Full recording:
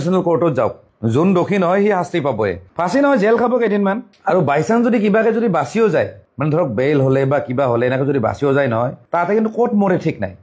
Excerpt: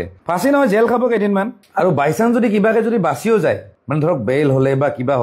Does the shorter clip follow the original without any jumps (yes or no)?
yes